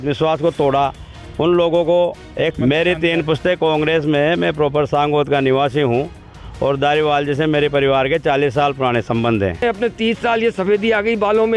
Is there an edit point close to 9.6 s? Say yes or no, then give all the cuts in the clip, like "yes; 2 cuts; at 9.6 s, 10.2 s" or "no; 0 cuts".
yes; 2 cuts; at 2.5 s, 9.6 s